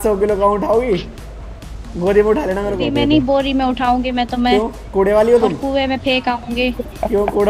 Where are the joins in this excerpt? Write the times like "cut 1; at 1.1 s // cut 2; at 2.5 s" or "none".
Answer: cut 1; at 2.9 s